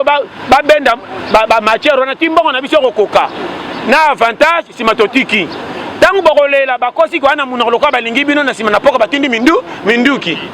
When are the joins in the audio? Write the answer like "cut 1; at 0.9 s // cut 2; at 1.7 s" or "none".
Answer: none